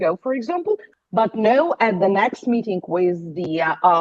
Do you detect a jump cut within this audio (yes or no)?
yes